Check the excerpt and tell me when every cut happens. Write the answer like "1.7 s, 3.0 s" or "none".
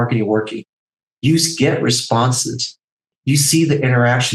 3.1 s